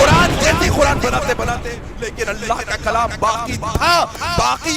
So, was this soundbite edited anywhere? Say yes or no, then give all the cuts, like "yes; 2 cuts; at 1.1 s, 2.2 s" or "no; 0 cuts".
yes; 1 cut; at 1.7 s